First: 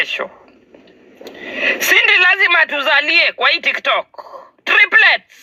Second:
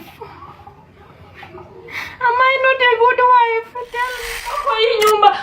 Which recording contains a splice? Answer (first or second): second